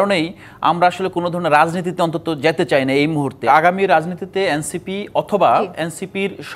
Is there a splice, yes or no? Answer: yes